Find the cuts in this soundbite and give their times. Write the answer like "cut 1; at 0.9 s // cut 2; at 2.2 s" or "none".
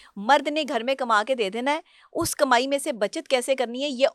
none

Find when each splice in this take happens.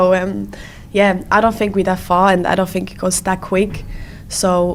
none

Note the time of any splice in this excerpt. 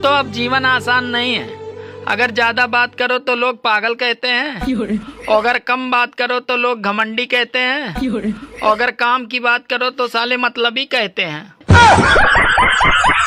none

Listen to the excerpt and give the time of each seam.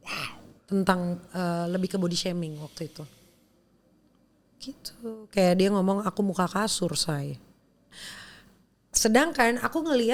cut 1; at 7.9 s

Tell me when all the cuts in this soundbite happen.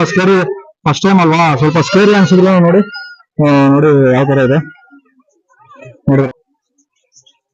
cut 1; at 6.3 s

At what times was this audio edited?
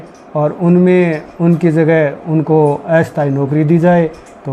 none

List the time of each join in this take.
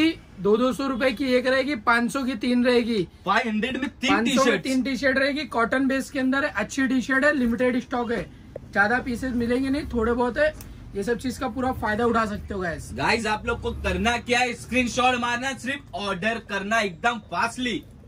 none

